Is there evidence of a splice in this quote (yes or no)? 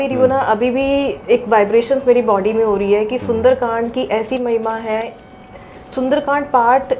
no